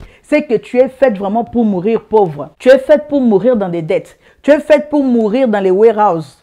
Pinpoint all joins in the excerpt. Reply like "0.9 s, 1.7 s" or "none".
2.5 s